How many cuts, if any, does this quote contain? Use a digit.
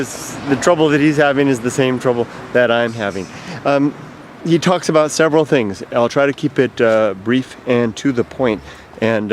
1